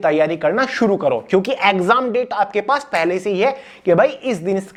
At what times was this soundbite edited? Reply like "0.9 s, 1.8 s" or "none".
none